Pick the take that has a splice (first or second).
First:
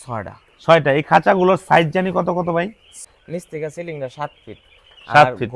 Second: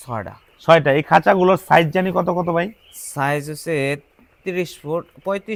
first